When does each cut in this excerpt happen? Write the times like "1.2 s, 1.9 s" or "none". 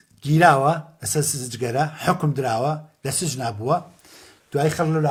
none